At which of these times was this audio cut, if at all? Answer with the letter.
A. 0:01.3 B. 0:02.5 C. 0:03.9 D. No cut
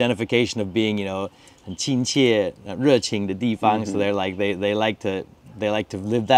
D